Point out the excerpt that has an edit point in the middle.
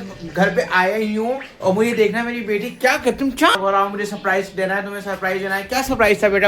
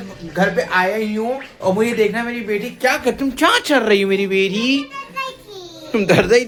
first; 1 cut; at 3.6 s

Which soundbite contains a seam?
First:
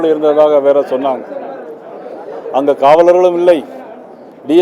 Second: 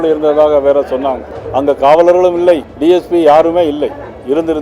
second; 2 cuts; at 1.3 s, 2.7 s

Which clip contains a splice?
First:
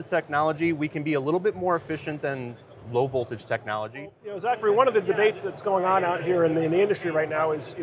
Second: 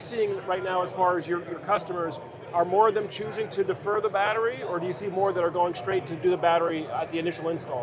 first; 1 cut; at 4.4 s

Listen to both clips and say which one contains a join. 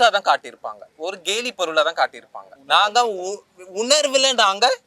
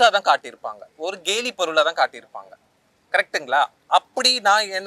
first; 1 cut; at 2.5 s

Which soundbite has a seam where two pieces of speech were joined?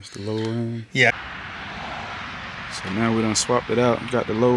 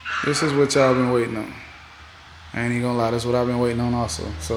first; 1 cut; at 1.1 s

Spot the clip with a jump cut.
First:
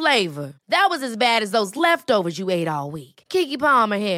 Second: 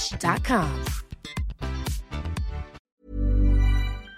second; 1 cut; at 2.9 s

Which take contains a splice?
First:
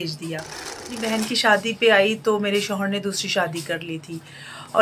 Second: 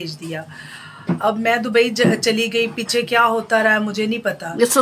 first; 1 cut; at 0.9 s

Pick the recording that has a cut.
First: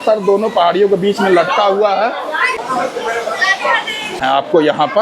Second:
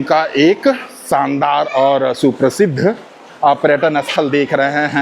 first; 2 cuts; at 2.6 s, 4.2 s

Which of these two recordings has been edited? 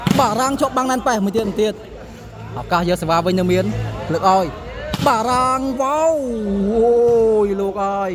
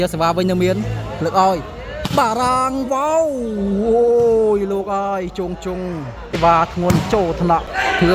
second; 1 cut; at 6.4 s

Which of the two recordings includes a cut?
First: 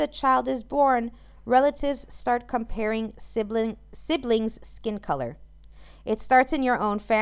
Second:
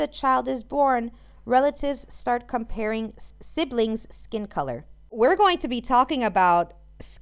second; 2 cuts; at 3.3 s, 5.1 s

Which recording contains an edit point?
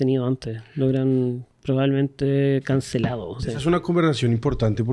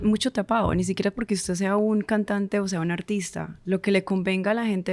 first; 1 cut; at 3.5 s

